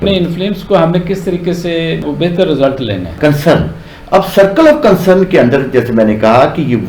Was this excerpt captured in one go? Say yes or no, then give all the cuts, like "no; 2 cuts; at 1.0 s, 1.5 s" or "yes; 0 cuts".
no; 1 cut; at 3.1 s